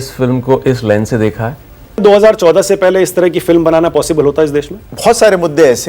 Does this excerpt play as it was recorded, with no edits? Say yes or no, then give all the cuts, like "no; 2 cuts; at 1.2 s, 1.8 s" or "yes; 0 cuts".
no; 2 cuts; at 2.0 s, 4.8 s